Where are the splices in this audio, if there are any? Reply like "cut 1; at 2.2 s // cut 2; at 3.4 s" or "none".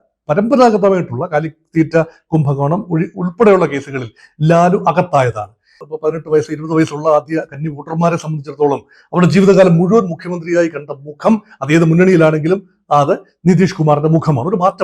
cut 1; at 5.8 s

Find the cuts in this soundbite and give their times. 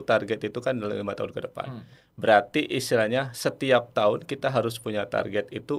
none

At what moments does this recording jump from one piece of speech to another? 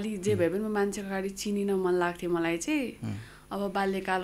none

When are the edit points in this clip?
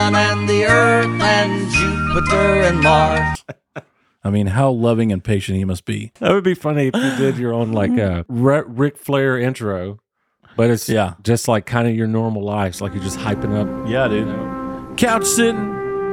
cut 1; at 6.1 s // cut 2; at 8.3 s

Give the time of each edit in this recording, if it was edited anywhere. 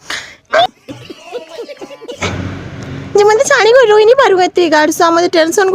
cut 1; at 0.7 s // cut 2; at 2.2 s

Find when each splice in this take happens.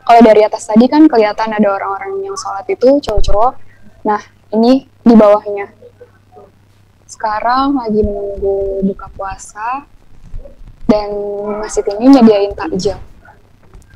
none

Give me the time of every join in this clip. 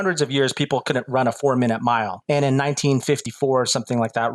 cut 1; at 2.1 s // cut 2; at 3.2 s

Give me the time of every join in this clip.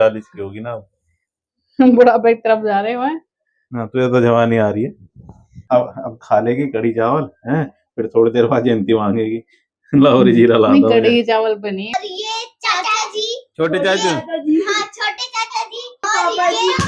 cut 1; at 5.6 s // cut 2; at 11.9 s // cut 3; at 16.1 s

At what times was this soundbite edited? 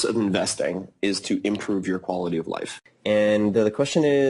cut 1; at 2.8 s

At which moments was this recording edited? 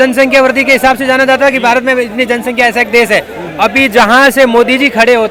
none

